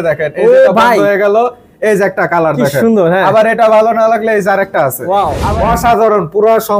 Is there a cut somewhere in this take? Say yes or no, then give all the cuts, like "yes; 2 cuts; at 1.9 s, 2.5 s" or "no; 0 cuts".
yes; 1 cut; at 5.4 s